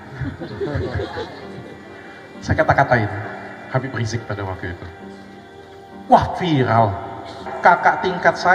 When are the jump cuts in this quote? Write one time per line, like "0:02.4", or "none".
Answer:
0:07.4